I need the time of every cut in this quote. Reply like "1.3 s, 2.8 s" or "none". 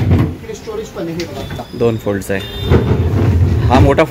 1.6 s